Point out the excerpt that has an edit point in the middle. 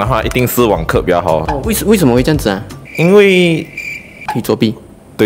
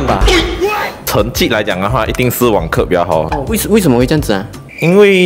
second; 1 cut; at 0.9 s

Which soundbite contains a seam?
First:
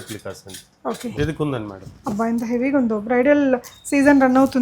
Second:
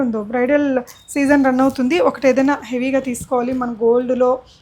first; 1 cut; at 1.1 s

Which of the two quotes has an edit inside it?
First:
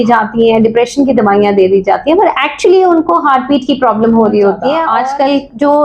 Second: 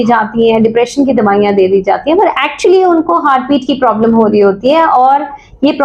first; 1 cut; at 4.9 s

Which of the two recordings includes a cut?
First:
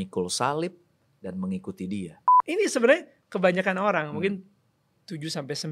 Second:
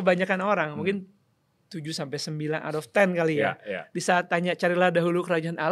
first; 1 cut; at 2.2 s

